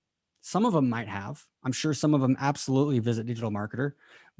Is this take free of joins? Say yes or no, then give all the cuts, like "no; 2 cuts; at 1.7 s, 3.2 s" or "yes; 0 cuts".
yes; 0 cuts